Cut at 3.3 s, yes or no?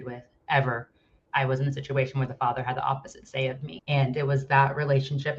no